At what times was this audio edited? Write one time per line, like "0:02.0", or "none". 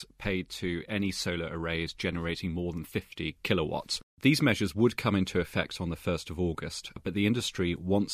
0:04.1
0:07.0